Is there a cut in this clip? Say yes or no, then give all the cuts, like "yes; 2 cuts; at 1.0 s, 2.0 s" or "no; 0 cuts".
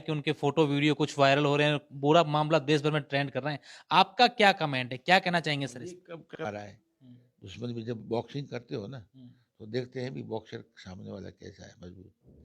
yes; 1 cut; at 6.4 s